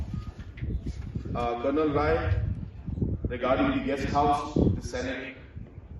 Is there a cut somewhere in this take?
yes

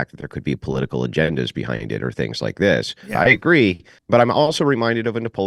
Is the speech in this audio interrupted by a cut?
yes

